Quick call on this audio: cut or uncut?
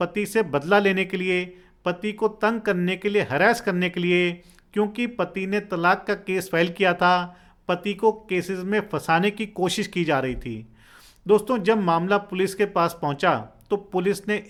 uncut